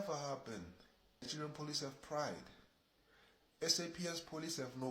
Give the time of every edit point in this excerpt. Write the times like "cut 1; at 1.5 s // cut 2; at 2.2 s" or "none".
cut 1; at 1.2 s